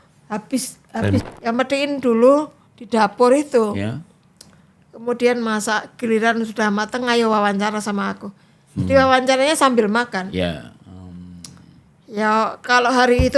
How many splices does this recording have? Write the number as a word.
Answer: one